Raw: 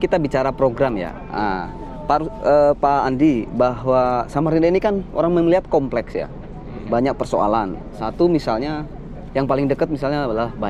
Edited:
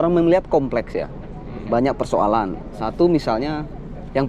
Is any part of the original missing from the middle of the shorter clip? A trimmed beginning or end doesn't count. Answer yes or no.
no